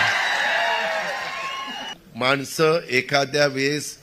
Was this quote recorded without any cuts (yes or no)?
no